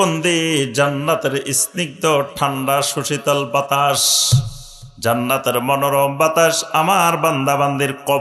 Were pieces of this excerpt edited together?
no; 0 cuts

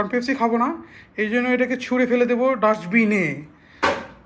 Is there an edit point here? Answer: no; 0 cuts

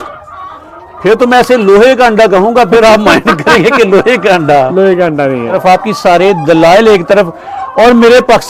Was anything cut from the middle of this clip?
yes; 1 cut; at 5.5 s

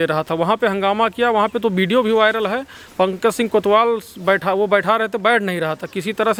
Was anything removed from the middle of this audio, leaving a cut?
no; 0 cuts

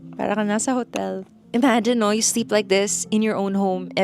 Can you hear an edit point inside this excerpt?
yes; 1 cut; at 1.3 s

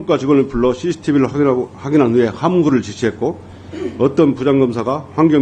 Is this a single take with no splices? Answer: yes; 0 cuts

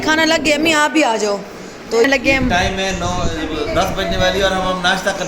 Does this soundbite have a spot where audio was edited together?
yes; 1 cut; at 2.1 s

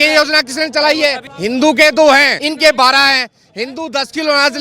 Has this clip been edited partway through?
yes; 2 cuts; at 1.3 s, 2.4 s

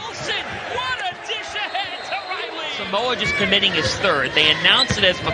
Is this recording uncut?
yes; 0 cuts

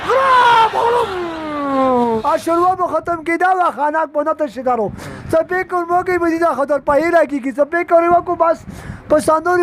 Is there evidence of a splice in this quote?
yes; 1 cut; at 2.2 s

